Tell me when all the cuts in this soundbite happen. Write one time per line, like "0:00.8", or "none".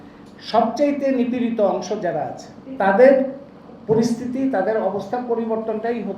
0:02.7